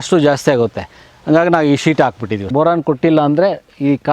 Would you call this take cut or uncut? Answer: cut